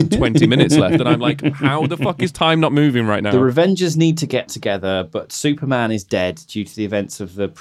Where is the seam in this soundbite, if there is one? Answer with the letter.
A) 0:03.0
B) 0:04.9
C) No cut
A